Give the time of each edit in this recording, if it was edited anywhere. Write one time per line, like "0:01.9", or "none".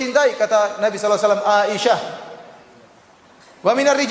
none